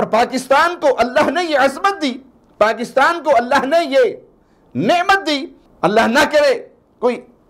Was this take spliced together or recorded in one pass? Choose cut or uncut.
cut